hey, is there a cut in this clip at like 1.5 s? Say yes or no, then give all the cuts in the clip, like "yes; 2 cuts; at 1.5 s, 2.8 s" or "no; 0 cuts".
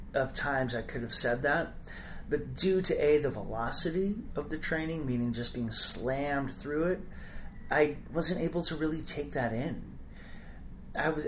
no; 0 cuts